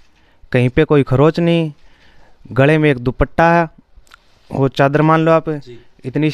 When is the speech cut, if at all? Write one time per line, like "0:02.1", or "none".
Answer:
none